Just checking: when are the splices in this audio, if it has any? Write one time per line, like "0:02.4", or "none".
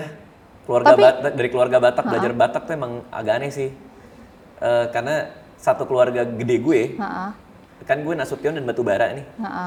none